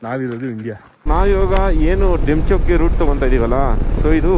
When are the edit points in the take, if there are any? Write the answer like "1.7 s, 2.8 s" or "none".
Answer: 1.0 s

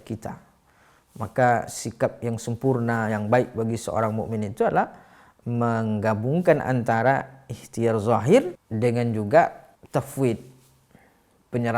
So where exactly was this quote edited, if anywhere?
8.6 s, 9.7 s

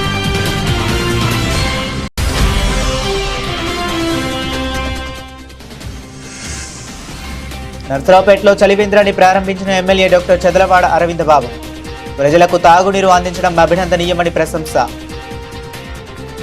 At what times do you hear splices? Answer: 2.0 s, 15.0 s

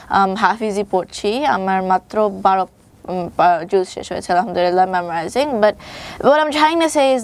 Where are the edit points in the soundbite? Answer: none

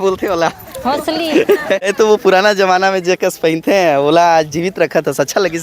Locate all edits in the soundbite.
1.9 s

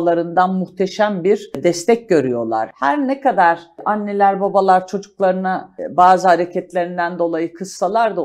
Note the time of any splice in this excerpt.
1.6 s, 2.7 s, 3.8 s, 5.8 s

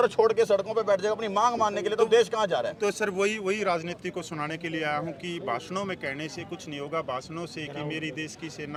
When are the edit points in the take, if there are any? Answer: none

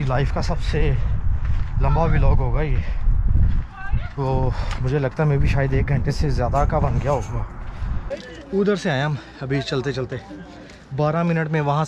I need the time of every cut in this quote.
8.0 s

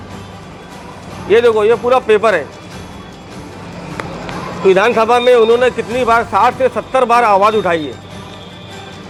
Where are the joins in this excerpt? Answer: none

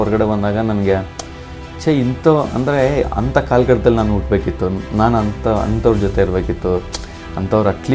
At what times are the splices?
none

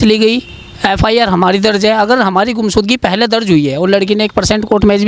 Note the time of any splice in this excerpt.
none

